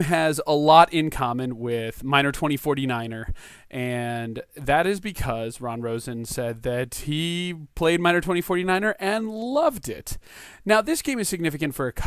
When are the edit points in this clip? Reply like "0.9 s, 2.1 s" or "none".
none